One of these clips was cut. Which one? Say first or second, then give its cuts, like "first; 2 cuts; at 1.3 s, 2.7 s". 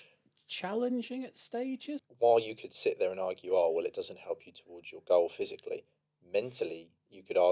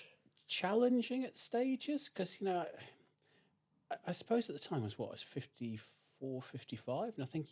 first; 1 cut; at 2.1 s